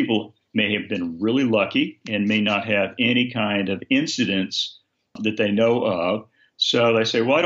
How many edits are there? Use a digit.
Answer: 0